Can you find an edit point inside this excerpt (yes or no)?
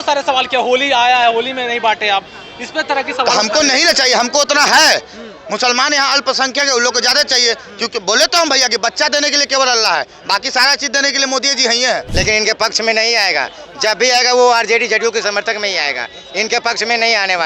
yes